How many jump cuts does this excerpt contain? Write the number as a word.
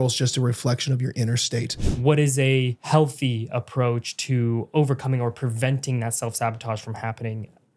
two